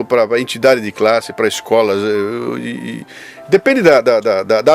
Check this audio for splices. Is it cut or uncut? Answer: uncut